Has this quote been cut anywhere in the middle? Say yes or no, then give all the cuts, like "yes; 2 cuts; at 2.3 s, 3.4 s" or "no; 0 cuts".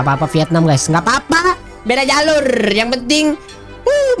no; 0 cuts